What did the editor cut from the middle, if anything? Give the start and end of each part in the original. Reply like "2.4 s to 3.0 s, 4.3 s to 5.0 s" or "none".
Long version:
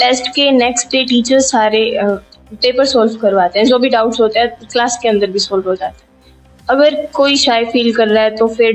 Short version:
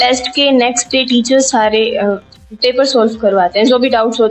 none